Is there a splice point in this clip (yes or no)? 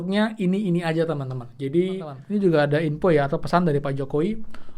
yes